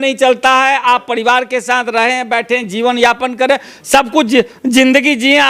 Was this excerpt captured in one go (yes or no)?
yes